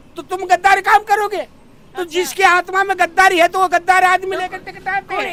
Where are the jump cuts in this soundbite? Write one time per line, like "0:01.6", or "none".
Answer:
none

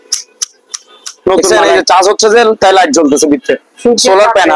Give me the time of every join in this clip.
0:01.4

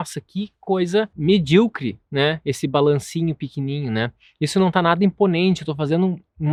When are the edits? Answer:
none

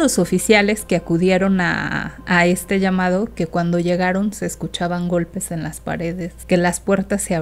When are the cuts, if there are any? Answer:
0:06.4

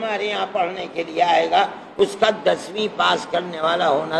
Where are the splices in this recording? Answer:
none

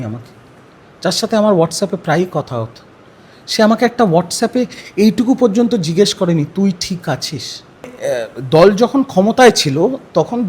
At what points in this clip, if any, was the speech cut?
0:07.9

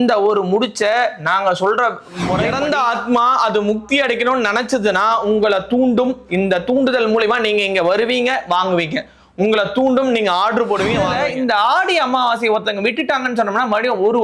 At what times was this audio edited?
0:02.5
0:11.1

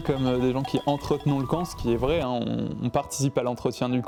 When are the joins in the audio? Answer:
none

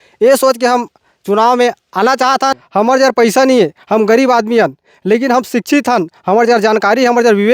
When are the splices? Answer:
0:02.6

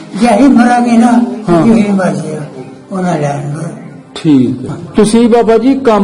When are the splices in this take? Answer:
0:04.8

